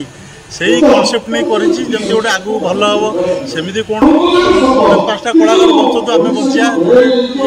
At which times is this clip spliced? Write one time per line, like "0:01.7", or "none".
0:04.0